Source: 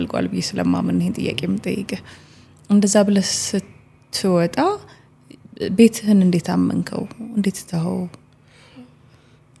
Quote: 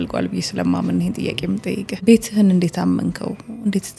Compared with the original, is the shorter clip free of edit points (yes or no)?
no